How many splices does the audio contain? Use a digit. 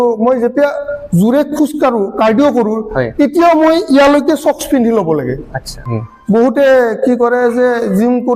1